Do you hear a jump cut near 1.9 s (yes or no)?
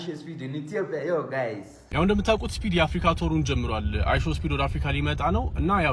yes